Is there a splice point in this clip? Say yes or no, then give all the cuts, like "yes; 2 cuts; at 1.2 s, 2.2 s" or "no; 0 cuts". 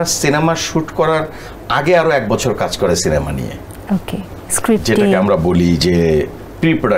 no; 0 cuts